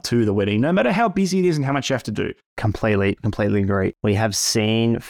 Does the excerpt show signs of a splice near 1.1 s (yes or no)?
no